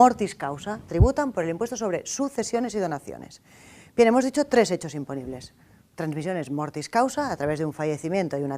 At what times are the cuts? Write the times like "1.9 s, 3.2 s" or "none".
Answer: 3.3 s